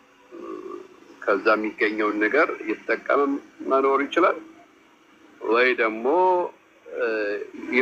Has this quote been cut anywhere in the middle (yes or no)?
no